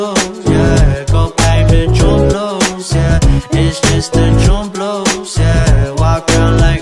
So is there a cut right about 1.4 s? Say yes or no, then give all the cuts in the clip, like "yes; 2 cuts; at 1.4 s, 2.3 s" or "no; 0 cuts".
yes; 1 cut; at 1.4 s